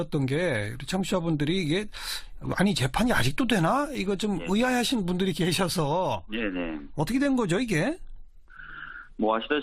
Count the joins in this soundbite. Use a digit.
1